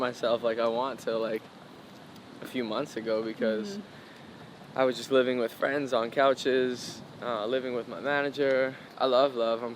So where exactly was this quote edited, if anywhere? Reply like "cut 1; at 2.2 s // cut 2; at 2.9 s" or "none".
cut 1; at 8.8 s